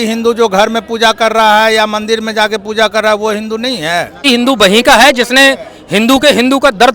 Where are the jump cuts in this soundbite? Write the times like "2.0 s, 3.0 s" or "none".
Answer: 4.2 s